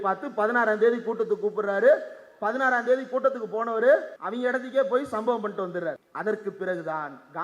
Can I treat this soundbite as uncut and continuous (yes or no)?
no